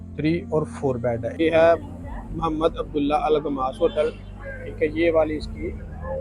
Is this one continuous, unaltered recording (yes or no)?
no